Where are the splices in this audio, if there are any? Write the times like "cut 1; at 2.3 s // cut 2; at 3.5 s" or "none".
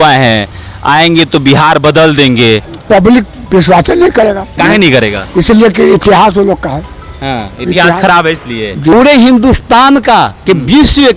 cut 1; at 2.7 s // cut 2; at 4.5 s // cut 3; at 8.9 s